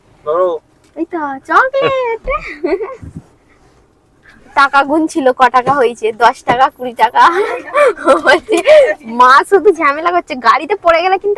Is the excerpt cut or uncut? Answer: uncut